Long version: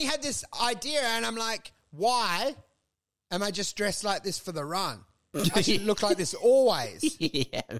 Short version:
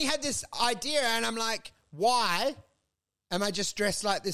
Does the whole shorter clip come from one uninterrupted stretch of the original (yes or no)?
yes